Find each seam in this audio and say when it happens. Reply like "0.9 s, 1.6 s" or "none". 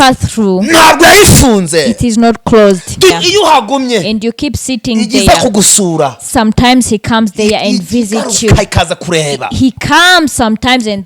3.1 s